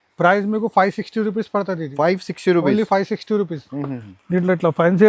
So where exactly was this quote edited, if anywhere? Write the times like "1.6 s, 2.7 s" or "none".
none